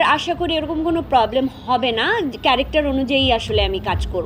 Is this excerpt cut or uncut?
uncut